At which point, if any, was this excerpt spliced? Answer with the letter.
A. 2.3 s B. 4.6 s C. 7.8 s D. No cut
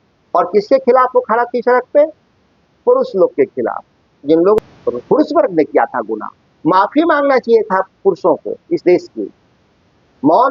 B